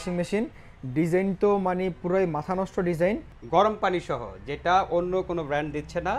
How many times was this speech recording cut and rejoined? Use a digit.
1